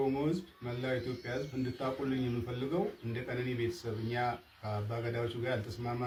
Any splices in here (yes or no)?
no